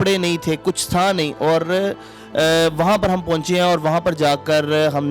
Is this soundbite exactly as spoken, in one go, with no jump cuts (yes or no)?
yes